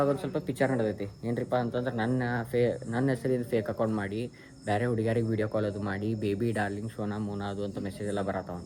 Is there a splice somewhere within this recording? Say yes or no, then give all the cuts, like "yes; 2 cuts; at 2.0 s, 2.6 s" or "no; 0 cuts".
no; 0 cuts